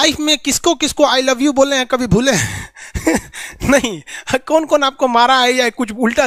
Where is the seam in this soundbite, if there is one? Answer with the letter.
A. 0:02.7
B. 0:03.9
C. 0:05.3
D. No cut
D